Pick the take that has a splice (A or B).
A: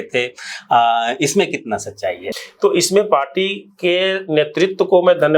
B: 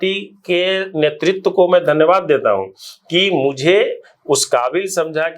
A